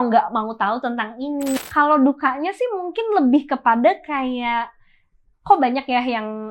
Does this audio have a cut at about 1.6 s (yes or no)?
yes